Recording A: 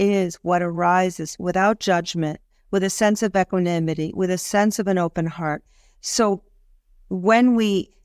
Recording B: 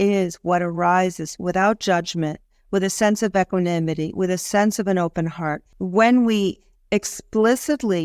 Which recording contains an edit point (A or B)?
B